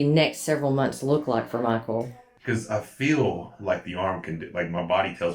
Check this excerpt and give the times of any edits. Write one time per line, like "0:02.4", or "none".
0:02.2

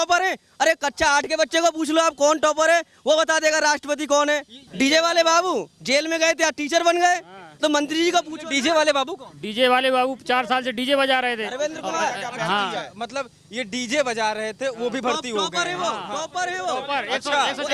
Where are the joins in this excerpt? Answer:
0:04.6

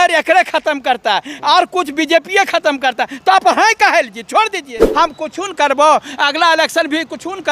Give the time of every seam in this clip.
0:04.9

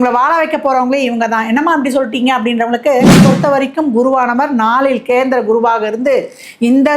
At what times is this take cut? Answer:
0:03.2

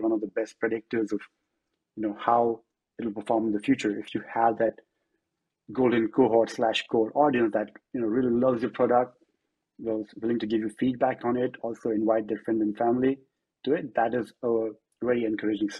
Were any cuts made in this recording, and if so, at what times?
none

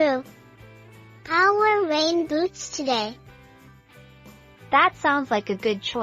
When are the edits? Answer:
0:03.2
0:04.7

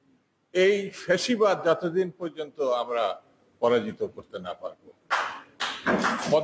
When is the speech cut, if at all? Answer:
none

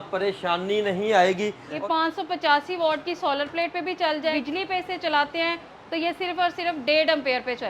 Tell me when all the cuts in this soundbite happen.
0:01.7
0:04.4

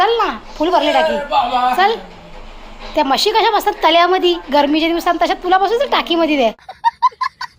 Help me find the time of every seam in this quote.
0:06.7

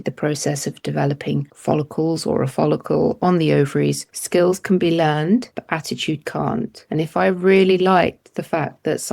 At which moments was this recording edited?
0:01.5
0:04.1
0:05.6
0:06.8

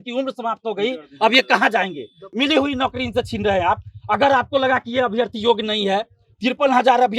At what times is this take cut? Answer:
0:02.2

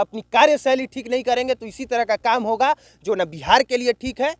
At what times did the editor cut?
none

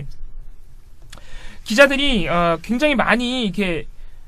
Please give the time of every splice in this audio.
0:01.9

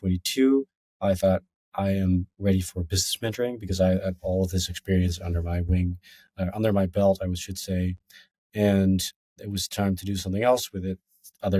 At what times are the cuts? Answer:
none

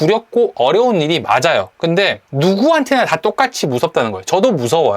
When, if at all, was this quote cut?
0:02.2

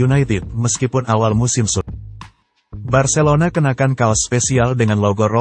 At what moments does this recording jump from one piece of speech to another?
0:01.8

